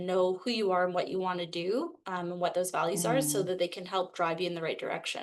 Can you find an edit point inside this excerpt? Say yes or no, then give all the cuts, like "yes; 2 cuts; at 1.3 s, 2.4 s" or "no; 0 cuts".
no; 0 cuts